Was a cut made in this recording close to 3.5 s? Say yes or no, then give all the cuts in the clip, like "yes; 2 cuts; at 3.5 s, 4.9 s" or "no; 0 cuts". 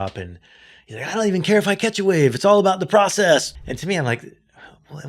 yes; 1 cut; at 3.5 s